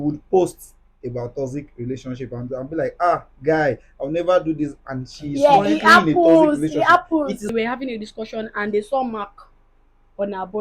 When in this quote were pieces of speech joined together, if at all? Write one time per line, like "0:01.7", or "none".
0:07.4

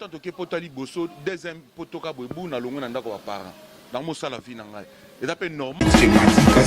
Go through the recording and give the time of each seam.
0:05.7

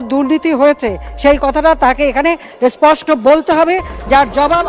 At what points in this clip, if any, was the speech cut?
none

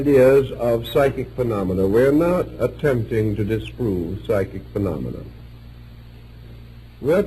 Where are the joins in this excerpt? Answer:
0:03.0

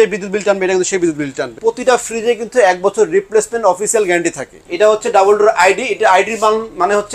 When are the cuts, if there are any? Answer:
0:01.5
0:04.6

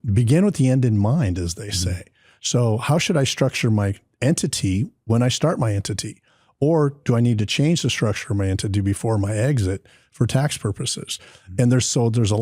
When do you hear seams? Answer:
0:04.0

